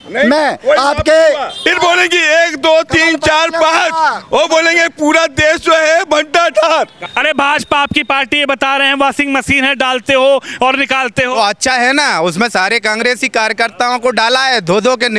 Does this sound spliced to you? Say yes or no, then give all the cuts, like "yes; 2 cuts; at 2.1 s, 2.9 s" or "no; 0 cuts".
yes; 2 cuts; at 1.7 s, 7.0 s